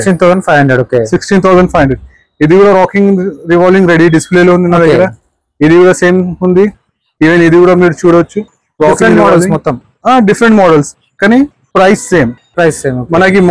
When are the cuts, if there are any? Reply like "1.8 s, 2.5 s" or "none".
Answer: none